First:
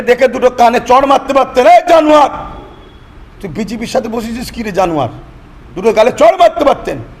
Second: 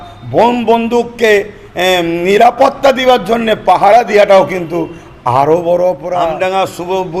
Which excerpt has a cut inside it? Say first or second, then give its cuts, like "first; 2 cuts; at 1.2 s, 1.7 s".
second; 1 cut; at 6.1 s